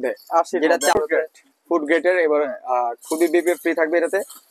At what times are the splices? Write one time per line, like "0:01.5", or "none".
0:01.0